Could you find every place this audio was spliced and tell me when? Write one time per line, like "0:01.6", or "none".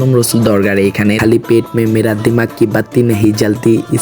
0:01.2